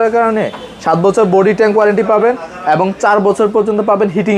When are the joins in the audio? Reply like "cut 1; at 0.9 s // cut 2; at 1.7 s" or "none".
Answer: none

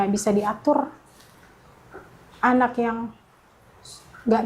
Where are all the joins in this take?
none

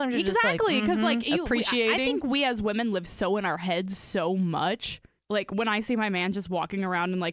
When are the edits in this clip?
cut 1; at 5.1 s

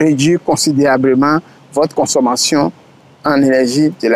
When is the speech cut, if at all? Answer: none

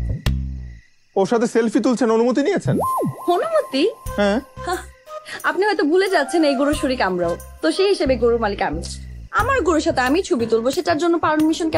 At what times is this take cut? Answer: cut 1; at 0.9 s

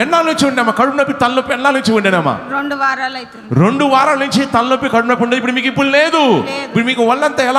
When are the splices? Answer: none

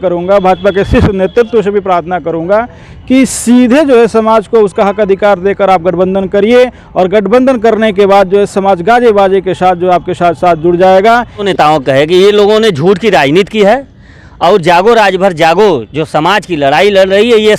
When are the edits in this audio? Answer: cut 1; at 11.5 s

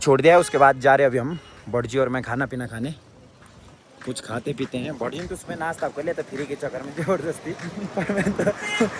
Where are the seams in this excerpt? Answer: none

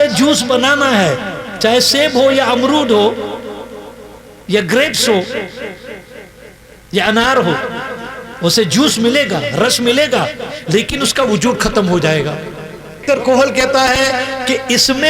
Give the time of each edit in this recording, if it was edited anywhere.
cut 1; at 13.0 s

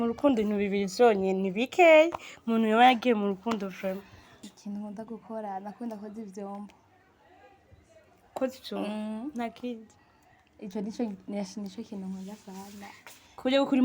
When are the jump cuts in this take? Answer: cut 1; at 4.5 s

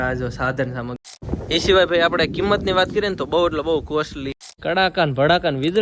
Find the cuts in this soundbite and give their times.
cut 1; at 1.0 s // cut 2; at 4.4 s

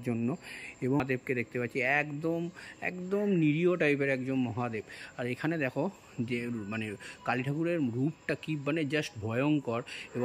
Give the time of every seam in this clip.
cut 1; at 1.0 s

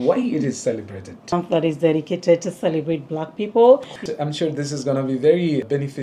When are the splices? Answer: cut 1; at 1.3 s // cut 2; at 3.9 s

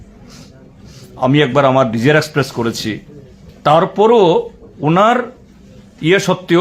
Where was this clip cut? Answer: none

